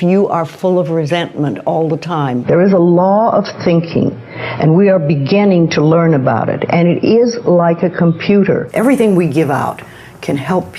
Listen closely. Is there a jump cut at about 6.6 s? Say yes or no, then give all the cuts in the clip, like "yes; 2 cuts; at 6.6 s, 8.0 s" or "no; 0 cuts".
no; 2 cuts; at 2.4 s, 8.7 s